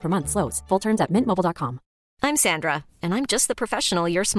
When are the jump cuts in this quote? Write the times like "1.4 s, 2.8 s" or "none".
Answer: 2.0 s